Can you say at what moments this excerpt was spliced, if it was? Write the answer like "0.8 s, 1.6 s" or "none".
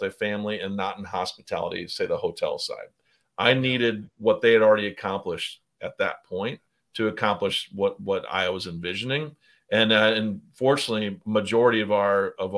none